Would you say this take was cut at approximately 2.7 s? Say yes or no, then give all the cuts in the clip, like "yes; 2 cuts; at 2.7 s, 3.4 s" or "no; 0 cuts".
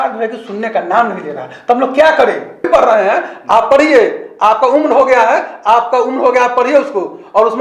yes; 1 cut; at 2.7 s